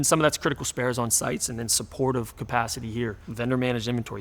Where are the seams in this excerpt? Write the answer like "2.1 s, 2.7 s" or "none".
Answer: 3.2 s